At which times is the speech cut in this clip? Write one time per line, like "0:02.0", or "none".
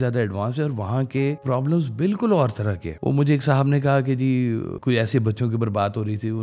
0:01.4
0:02.9
0:04.7